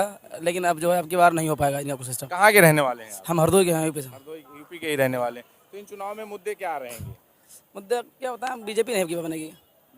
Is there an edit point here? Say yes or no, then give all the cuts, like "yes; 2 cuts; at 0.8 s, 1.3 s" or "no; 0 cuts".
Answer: no; 0 cuts